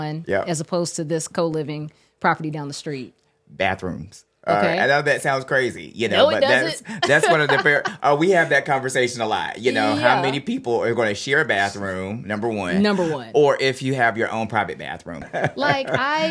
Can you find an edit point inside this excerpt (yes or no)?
yes